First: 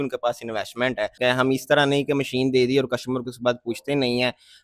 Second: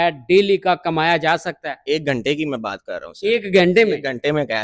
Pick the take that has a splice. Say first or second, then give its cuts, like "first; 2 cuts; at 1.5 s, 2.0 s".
first; 1 cut; at 1.2 s